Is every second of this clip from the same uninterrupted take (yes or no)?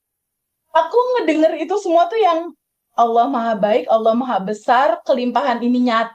yes